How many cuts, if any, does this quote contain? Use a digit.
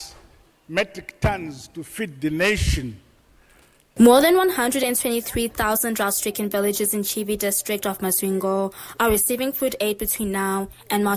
1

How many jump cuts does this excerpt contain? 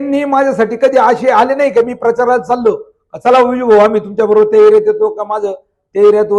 0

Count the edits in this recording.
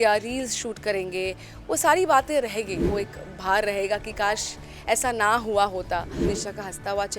2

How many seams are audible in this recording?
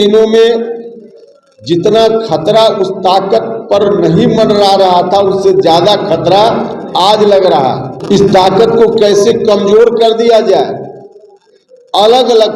1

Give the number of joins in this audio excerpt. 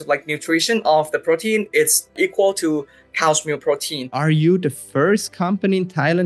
2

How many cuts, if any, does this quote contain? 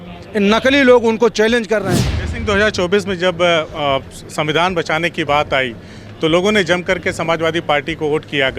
1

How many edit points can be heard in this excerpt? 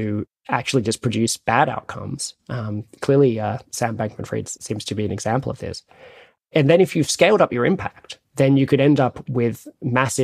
1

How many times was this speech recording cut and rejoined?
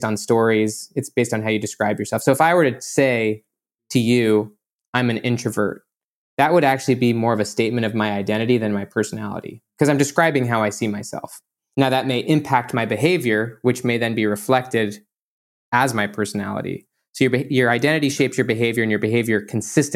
1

